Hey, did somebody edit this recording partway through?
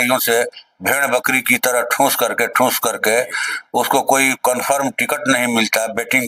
no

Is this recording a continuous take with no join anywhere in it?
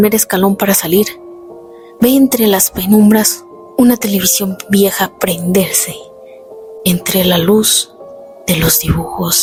yes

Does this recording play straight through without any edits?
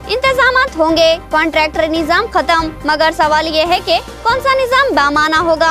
yes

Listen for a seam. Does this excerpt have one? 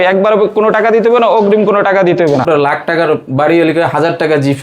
yes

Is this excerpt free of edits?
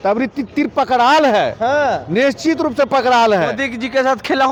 yes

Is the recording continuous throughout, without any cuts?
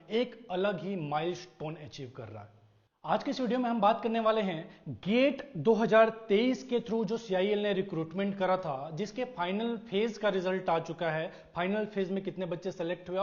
yes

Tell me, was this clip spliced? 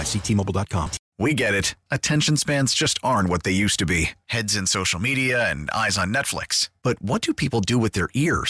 yes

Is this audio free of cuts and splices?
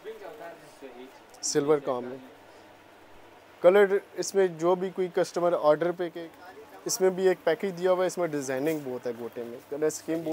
no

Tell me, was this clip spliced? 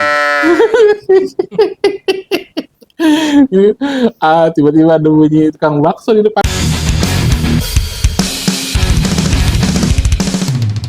yes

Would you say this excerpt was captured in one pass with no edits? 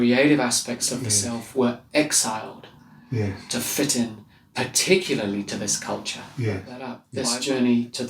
no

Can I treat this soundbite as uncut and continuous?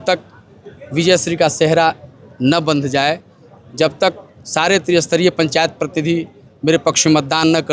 yes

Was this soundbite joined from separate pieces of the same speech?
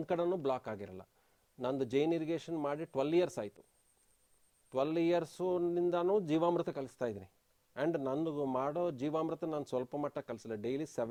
no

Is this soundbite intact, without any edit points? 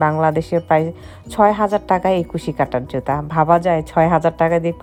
yes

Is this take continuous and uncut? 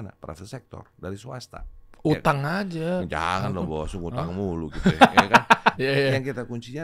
no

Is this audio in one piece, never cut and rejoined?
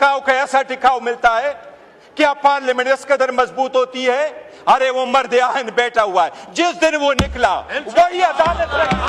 yes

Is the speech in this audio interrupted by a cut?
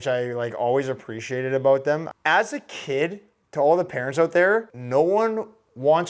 yes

